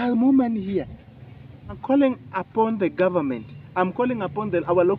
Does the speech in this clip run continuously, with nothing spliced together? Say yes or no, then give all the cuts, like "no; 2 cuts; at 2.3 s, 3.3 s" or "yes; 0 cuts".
no; 1 cut; at 1.8 s